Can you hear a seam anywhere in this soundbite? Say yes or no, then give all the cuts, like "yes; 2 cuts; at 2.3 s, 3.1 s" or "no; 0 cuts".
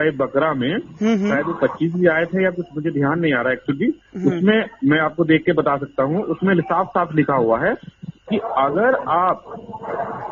no; 0 cuts